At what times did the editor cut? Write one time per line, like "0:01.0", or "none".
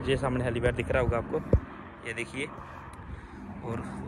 none